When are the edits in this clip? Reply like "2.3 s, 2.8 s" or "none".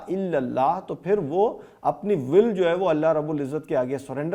none